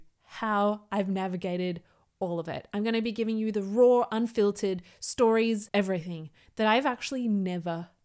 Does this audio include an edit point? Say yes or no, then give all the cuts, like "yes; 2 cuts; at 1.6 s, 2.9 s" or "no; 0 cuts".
no; 0 cuts